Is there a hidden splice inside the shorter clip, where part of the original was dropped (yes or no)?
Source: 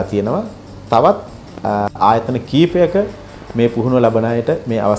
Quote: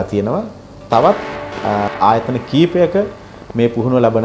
no